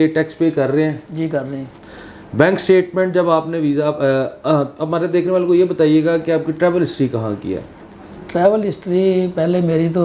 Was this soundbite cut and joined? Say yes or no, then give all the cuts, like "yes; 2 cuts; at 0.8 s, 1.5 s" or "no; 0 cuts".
no; 0 cuts